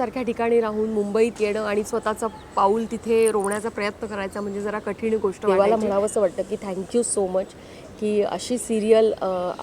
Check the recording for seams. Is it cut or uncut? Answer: cut